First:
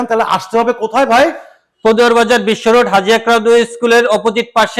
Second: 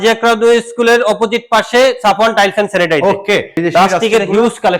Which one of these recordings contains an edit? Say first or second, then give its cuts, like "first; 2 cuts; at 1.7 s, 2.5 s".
second; 1 cut; at 3.5 s